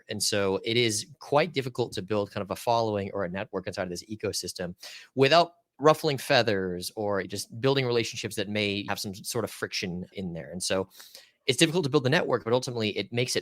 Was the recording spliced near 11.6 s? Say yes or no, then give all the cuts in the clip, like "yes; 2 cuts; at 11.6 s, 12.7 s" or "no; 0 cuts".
no; 4 cuts; at 5.6 s, 7.3 s, 8.9 s, 10.1 s